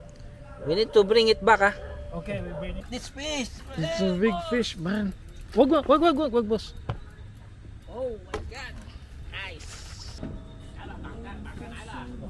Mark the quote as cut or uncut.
cut